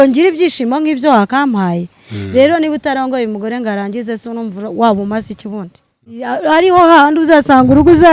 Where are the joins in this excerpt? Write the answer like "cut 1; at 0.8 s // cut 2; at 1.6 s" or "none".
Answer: cut 1; at 6.2 s